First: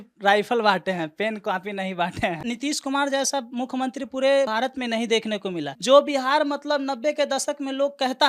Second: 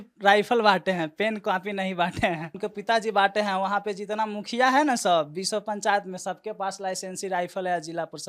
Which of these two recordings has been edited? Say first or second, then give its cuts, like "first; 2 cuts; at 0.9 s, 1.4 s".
first; 1 cut; at 2.4 s